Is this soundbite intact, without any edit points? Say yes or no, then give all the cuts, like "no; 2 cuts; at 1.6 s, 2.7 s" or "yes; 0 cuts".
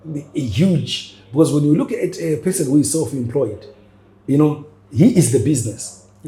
yes; 0 cuts